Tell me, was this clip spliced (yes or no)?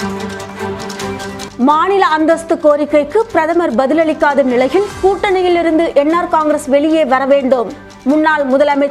no